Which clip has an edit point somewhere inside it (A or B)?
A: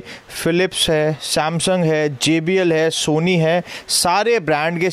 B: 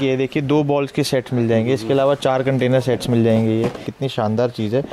B